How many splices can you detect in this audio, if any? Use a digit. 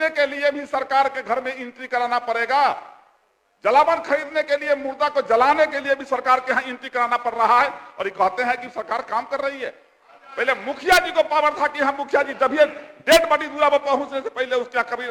0